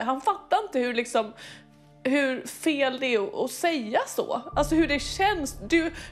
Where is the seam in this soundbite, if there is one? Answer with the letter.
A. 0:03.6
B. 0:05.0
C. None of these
C